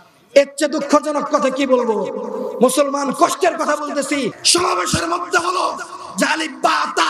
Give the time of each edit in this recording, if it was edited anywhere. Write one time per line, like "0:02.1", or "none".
0:04.4